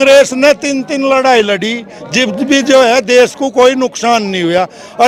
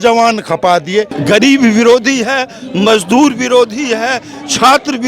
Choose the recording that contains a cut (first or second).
second